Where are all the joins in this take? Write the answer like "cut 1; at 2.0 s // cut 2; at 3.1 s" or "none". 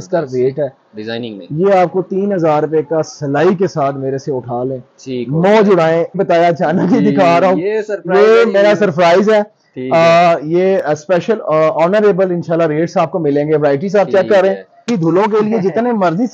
cut 1; at 6.2 s // cut 2; at 14.9 s